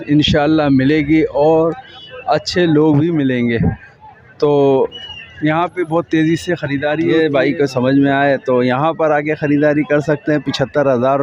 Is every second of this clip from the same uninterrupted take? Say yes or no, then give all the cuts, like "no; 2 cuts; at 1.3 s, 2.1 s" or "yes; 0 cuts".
no; 1 cut; at 7.1 s